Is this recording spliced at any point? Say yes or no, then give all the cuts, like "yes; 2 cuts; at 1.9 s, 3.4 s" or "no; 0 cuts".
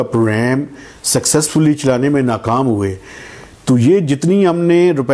no; 0 cuts